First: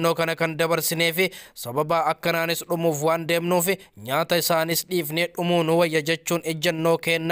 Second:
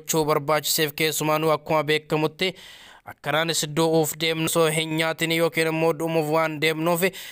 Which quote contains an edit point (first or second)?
second